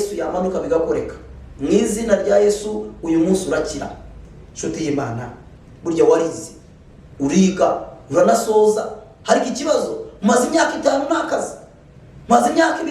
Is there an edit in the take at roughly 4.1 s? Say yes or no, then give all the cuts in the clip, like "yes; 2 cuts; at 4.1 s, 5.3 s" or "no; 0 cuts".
yes; 1 cut; at 4.1 s